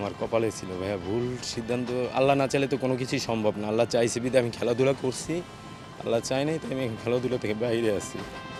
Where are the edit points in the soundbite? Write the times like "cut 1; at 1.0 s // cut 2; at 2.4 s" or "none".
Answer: none